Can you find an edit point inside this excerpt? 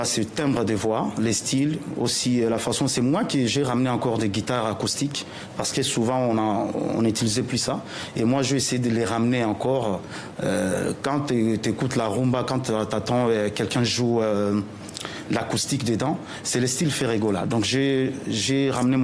no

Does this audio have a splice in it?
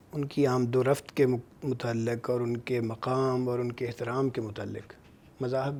no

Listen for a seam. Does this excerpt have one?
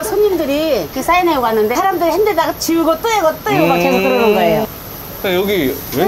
yes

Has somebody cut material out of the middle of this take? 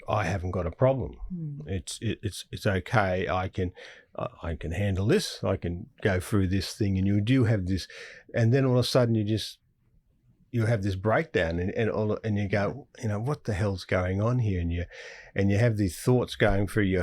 no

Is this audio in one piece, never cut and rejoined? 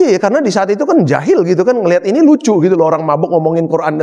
yes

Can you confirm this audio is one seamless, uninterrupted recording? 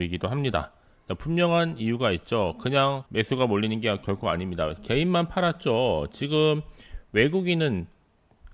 no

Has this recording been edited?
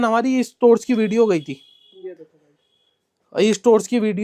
no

